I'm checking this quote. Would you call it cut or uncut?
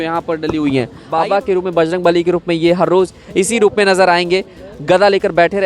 cut